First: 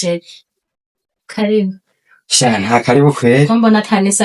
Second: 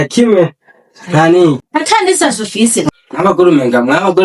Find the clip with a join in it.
second; 2 cuts; at 1.6 s, 2.9 s

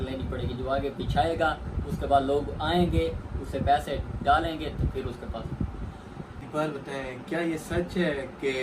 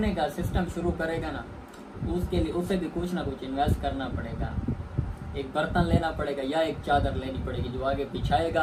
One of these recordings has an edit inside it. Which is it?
first; 1 cut; at 6.5 s

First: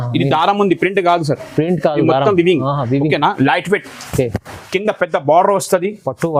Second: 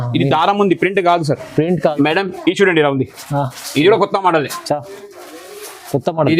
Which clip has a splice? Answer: second; 1 cut; at 1.9 s

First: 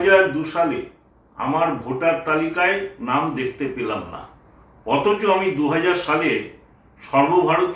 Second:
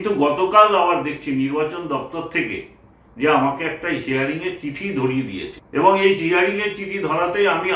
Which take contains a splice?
second; 1 cut; at 5.6 s

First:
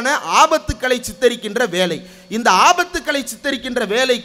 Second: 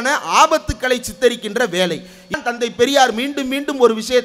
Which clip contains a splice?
second; 1 cut; at 2.4 s

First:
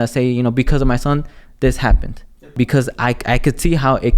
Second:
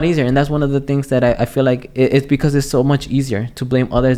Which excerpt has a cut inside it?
first; 1 cut; at 2.5 s

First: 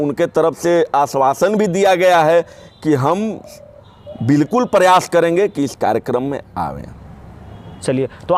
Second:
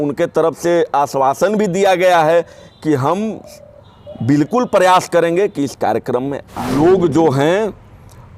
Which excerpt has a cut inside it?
second; 1 cut; at 6.7 s

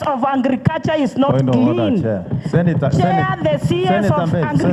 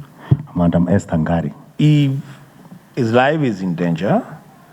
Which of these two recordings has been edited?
second; 1 cut; at 1.6 s

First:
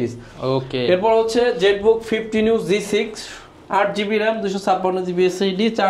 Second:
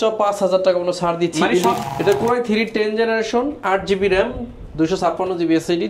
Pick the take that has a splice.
second; 1 cut; at 1.8 s

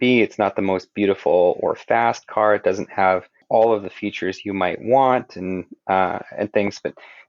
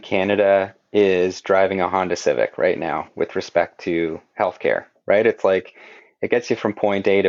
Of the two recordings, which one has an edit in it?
first; 1 cut; at 3.4 s

